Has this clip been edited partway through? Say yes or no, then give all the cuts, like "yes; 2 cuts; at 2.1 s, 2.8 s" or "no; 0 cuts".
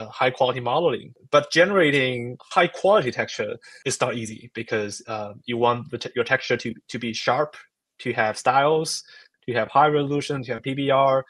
yes; 3 cuts; at 1.2 s, 2.3 s, 3.7 s